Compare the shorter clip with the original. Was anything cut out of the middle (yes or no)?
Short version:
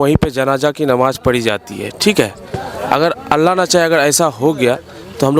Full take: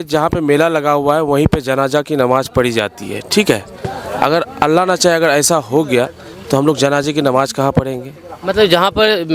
no